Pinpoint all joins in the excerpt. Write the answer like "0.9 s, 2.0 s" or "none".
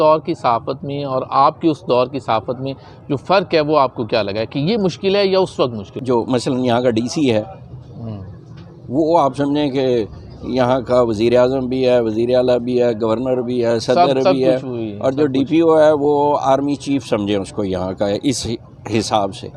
5.9 s

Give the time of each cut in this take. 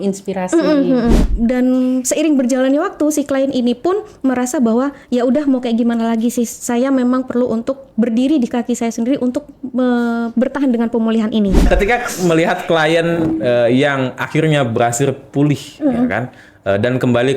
1.2 s, 11.7 s

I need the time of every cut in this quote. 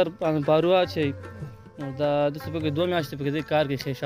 none

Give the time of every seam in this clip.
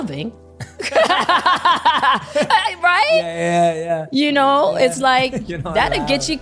none

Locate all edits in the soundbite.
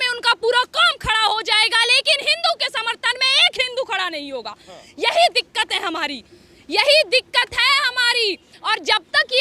none

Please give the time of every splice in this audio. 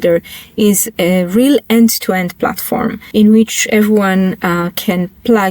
0.9 s, 3.0 s

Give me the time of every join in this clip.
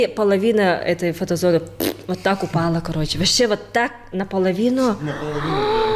none

